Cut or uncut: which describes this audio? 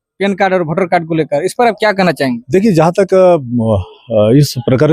uncut